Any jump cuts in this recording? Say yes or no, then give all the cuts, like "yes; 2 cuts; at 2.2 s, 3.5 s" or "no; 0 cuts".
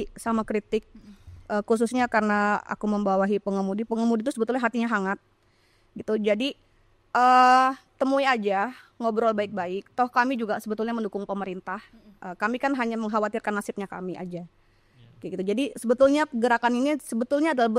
no; 0 cuts